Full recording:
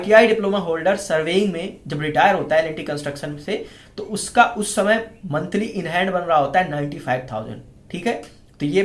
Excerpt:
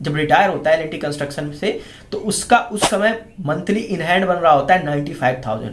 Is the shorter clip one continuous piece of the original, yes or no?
yes